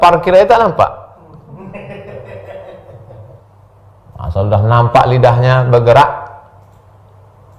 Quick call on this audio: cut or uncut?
cut